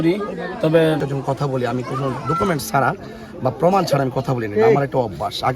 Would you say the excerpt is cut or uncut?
cut